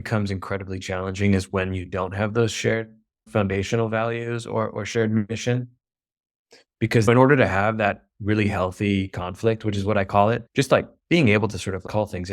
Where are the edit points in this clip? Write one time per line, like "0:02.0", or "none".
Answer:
0:07.0